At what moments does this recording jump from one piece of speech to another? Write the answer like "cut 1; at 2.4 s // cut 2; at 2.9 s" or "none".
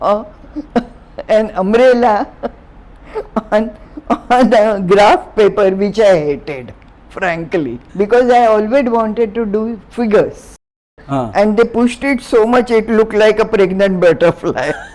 cut 1; at 7.8 s // cut 2; at 10.9 s